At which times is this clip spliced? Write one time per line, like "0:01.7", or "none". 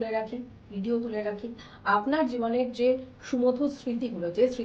0:01.7